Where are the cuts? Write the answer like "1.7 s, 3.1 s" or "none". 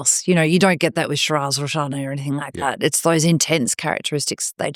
none